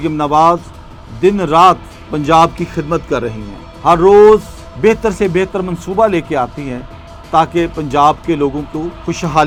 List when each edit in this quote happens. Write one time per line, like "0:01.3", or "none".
none